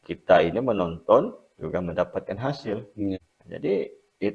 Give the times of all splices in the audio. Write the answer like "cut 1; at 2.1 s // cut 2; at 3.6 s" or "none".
cut 1; at 3.3 s